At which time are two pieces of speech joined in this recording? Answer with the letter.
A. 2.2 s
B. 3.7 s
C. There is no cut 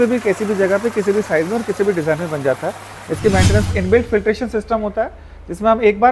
B